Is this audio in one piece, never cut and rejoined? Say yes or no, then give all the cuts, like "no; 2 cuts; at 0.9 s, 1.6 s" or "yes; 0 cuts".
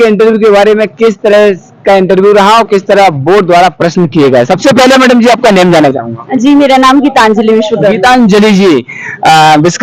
yes; 0 cuts